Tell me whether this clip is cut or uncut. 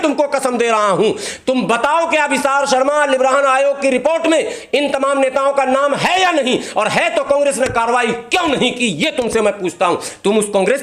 uncut